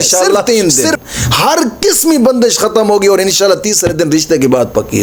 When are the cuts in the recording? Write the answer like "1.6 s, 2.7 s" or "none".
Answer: none